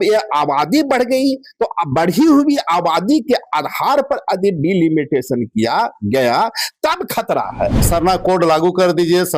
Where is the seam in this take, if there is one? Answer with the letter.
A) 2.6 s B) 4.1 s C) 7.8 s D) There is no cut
C